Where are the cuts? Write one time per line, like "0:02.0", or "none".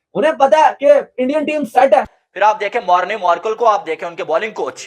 0:02.2

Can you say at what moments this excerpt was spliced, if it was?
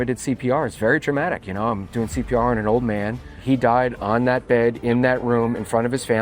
0:03.3

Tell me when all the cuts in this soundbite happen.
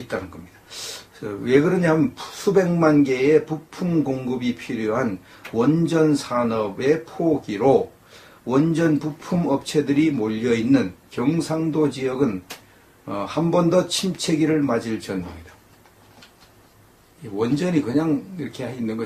0:06.3

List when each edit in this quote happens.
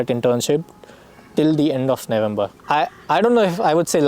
0:02.6

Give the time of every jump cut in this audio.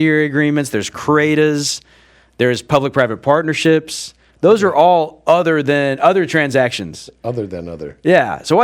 none

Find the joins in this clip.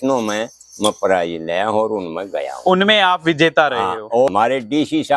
0:04.3

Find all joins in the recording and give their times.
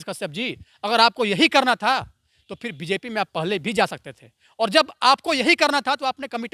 none

